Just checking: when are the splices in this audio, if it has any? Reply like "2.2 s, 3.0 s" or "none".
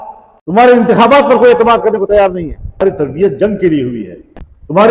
2.6 s

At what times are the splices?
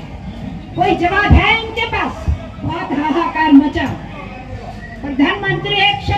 2.8 s

